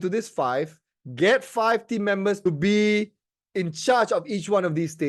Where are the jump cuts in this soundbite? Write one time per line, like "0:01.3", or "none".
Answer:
0:02.4